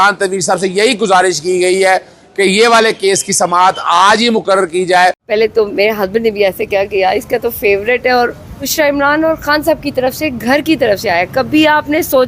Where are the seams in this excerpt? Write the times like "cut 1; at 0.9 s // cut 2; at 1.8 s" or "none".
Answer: cut 1; at 5.2 s // cut 2; at 8.7 s